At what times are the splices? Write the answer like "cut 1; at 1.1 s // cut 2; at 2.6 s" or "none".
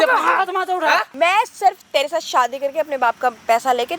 cut 1; at 1.1 s